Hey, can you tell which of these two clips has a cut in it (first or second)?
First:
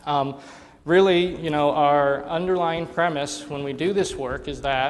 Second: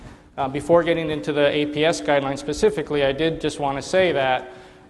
first